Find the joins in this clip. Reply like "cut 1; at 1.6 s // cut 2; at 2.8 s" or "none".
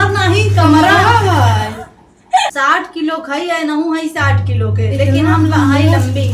cut 1; at 2.9 s

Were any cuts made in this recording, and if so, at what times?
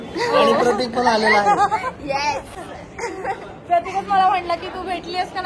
none

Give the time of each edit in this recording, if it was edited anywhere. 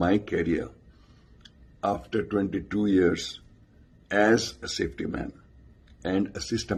none

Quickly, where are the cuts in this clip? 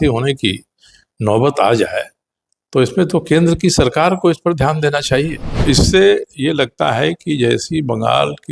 cut 1; at 5.6 s

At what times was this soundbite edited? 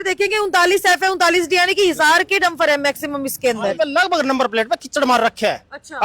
cut 1; at 3.7 s

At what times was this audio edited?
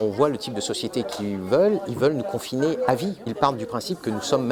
cut 1; at 3.3 s

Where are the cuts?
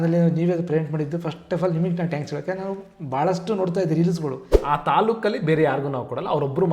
cut 1; at 4.5 s

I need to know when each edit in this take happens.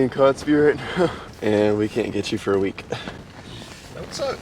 cut 1; at 1.3 s // cut 2; at 3.3 s

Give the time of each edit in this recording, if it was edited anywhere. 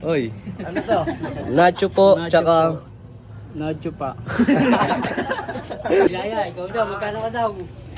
cut 1; at 6.1 s

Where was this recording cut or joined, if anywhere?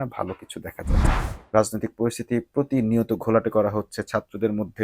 cut 1; at 1.0 s

